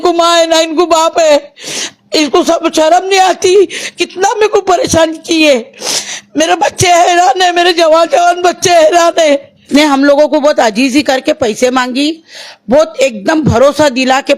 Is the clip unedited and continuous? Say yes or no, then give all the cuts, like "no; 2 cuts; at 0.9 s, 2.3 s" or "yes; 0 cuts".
no; 1 cut; at 9.6 s